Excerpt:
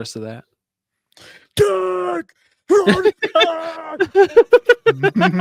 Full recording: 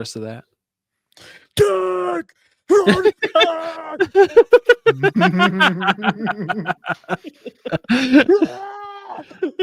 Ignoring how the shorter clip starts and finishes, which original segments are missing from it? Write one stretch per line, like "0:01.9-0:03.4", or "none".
none